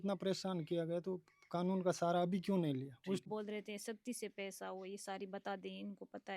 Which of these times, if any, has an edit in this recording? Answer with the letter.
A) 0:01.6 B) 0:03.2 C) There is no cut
B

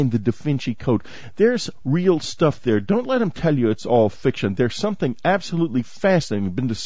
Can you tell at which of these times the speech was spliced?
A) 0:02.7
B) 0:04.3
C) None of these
B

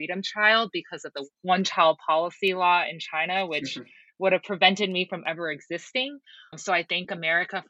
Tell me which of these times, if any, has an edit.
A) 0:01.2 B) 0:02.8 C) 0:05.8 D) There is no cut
A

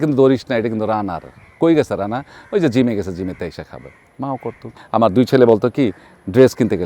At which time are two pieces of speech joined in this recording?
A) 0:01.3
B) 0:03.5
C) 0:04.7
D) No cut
C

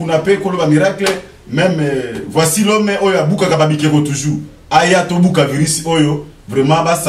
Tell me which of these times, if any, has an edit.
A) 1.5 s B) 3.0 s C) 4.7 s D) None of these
D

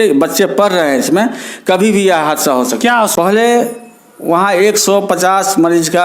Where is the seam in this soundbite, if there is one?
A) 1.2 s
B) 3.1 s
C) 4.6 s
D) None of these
B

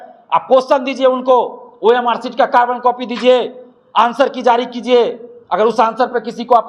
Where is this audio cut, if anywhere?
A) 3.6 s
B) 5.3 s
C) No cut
C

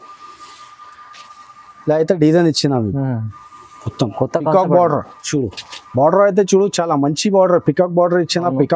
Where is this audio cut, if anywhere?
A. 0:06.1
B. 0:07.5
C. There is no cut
C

